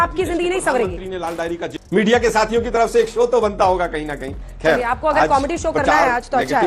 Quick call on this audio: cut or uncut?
cut